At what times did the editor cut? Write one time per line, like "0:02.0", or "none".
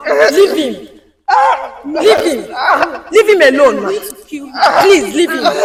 none